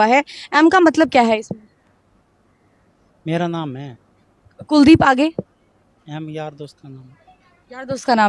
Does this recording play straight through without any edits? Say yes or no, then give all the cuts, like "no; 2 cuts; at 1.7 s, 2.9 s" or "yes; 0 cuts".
yes; 0 cuts